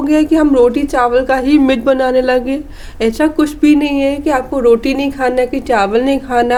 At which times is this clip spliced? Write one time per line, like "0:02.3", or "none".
none